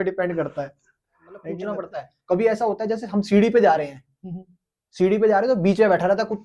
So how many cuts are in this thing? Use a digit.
1